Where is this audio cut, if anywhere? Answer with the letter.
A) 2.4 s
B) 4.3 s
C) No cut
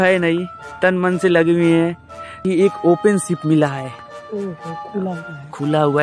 A